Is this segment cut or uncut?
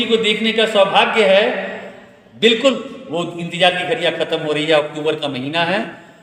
uncut